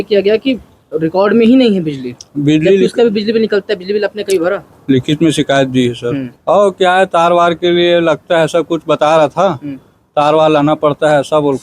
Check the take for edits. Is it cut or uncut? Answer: cut